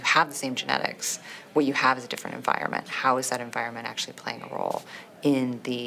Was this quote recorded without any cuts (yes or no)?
yes